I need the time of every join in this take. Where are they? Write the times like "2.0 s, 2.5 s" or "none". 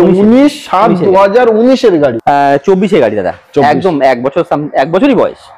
2.2 s